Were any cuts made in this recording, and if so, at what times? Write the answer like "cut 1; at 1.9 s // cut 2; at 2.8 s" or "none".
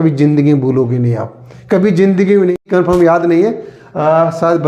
cut 1; at 2.6 s